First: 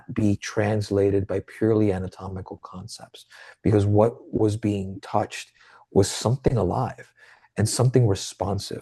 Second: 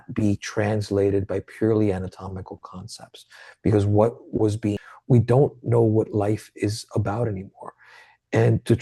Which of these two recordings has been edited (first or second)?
second